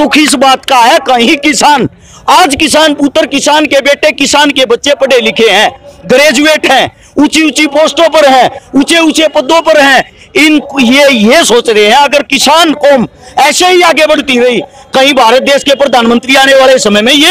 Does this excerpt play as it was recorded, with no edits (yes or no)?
yes